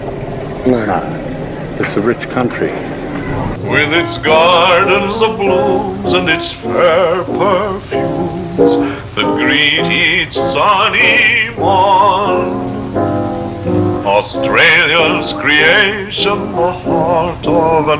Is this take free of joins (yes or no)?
no